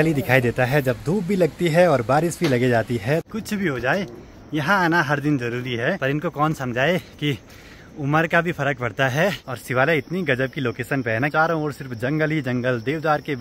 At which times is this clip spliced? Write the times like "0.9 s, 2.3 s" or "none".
3.3 s, 6.0 s, 9.6 s, 11.3 s